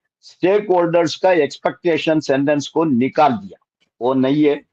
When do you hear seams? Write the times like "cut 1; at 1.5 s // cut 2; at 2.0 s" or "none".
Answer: none